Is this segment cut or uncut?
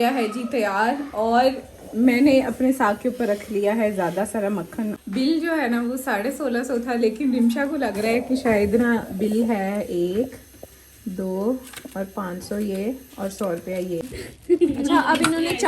cut